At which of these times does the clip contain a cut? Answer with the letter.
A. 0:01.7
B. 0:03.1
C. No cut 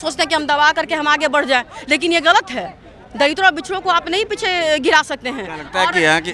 C